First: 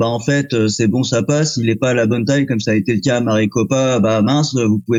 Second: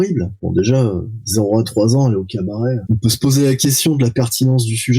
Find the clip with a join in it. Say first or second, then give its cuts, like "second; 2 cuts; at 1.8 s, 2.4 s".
second; 1 cut; at 2.8 s